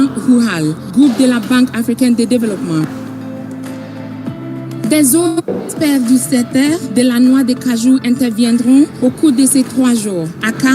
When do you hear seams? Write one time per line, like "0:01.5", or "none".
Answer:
0:01.1